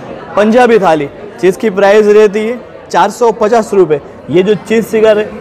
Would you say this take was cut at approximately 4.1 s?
yes; 1 cut; at 4.1 s

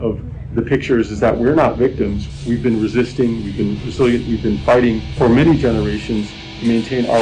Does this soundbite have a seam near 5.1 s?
yes; 2 cuts; at 2.2 s, 5.1 s

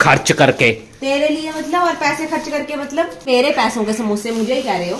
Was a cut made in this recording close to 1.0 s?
no; 1 cut; at 3.2 s

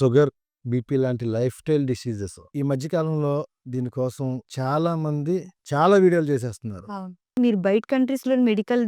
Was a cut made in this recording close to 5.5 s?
no; 1 cut; at 7.4 s

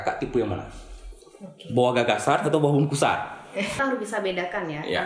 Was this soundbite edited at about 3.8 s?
yes; 1 cut; at 3.8 s

